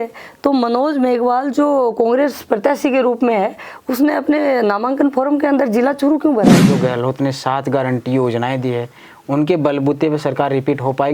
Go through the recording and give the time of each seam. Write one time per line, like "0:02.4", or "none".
0:06.7